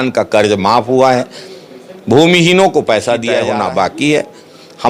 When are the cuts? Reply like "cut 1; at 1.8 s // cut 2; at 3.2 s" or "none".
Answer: cut 1; at 3.3 s